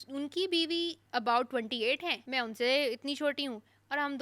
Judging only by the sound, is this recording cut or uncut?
cut